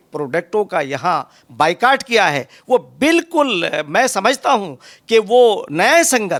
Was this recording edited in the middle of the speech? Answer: no; 0 cuts

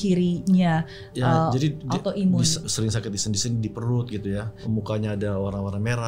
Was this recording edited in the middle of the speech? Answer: yes; 2 cuts; at 2.7 s, 4.5 s

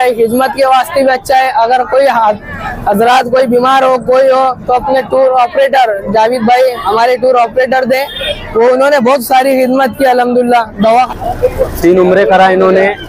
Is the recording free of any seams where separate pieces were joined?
no; 1 cut; at 11.1 s

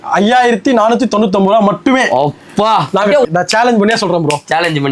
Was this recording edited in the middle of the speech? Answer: yes; 1 cut; at 3.3 s

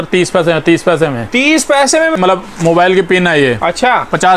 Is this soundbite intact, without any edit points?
no; 1 cut; at 2.1 s

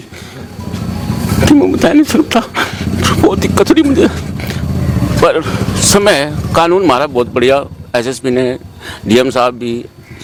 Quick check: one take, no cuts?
yes; 0 cuts

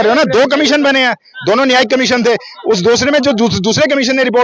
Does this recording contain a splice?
no; 0 cuts

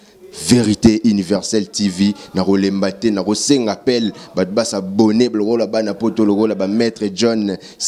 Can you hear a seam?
no; 0 cuts

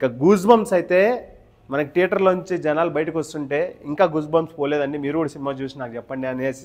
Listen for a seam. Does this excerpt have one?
no; 0 cuts

